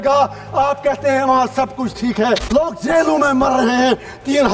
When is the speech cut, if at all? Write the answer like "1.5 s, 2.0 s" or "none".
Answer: 2.4 s